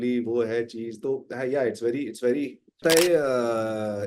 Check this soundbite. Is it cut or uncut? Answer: cut